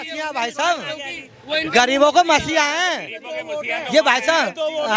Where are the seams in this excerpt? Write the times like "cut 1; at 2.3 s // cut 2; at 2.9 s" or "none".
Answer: none